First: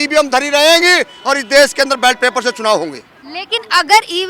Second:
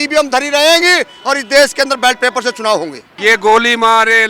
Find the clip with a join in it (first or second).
second